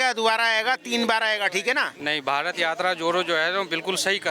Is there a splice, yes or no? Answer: yes